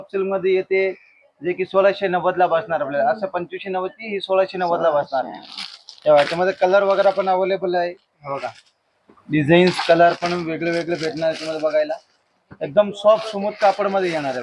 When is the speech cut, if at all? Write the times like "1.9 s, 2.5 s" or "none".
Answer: none